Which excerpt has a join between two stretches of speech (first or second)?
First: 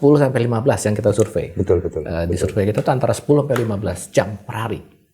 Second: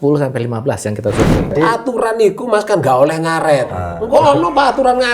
second